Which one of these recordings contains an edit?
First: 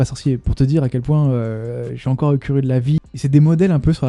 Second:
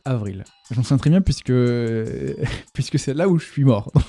first; 1 cut; at 3.1 s

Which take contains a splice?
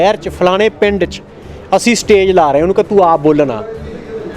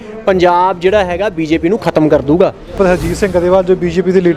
second; 1 cut; at 2.7 s

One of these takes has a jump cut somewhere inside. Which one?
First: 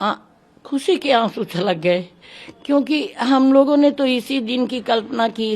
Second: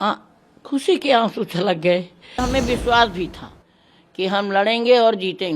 second; 1 cut; at 2.4 s

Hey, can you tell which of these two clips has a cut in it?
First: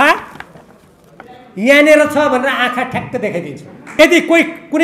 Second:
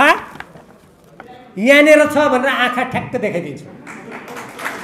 first; 1 cut; at 3.9 s

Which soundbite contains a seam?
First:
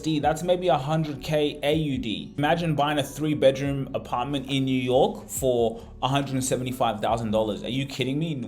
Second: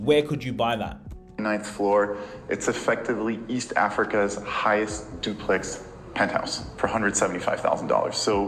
first; 1 cut; at 2.3 s

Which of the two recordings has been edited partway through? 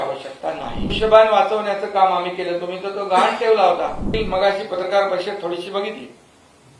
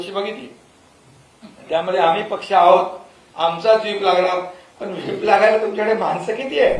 first; 2 cuts; at 0.9 s, 4.1 s

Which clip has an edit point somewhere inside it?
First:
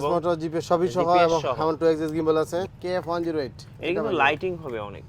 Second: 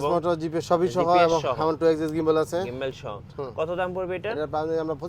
first; 1 cut; at 2.7 s

